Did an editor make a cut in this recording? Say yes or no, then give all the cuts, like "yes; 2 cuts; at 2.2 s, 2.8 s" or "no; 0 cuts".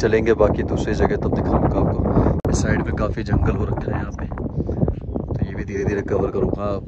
no; 0 cuts